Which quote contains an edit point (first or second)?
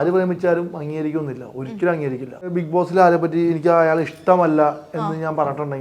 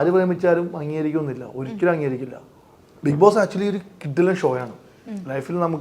first